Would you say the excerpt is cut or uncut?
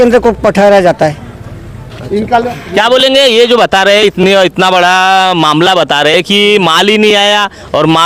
uncut